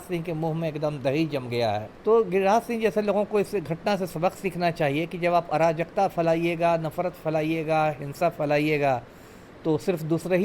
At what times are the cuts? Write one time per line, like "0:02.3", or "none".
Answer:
0:01.9